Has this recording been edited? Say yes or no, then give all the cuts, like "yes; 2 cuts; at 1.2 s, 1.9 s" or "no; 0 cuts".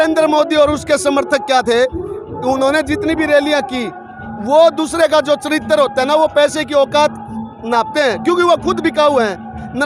no; 0 cuts